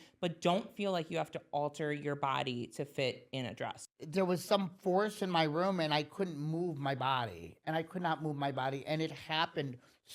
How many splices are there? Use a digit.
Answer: 1